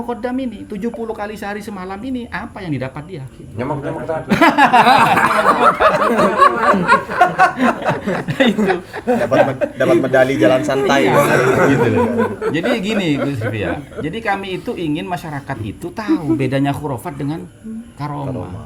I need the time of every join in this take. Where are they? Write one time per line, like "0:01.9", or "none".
none